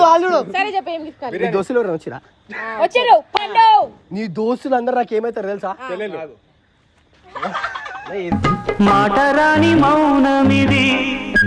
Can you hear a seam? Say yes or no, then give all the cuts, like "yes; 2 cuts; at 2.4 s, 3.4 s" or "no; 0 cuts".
no; 0 cuts